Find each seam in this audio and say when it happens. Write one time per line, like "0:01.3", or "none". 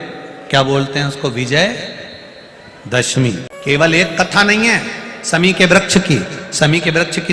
0:03.2